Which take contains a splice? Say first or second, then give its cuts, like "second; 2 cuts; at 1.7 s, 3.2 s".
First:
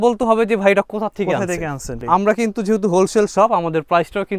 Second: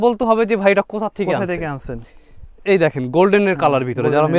first; 1 cut; at 2.0 s